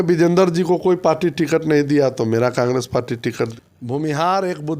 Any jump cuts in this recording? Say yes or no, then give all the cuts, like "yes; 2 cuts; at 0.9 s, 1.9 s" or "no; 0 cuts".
yes; 1 cut; at 3.5 s